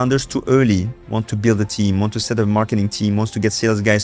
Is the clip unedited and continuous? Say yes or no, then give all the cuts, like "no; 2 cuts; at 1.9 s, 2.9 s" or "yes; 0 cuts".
yes; 0 cuts